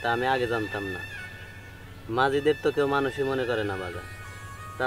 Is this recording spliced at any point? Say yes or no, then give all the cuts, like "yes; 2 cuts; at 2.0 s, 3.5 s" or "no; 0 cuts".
no; 0 cuts